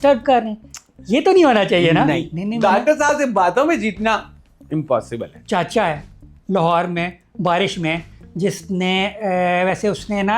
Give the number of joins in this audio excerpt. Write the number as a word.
two